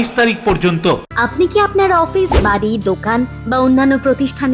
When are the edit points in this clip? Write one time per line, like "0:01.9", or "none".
0:01.1